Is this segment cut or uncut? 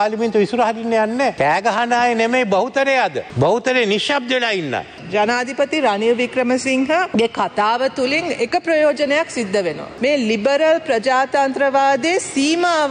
cut